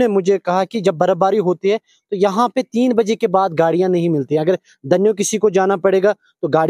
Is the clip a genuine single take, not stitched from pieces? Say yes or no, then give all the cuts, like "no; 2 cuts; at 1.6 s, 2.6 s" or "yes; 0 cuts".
yes; 0 cuts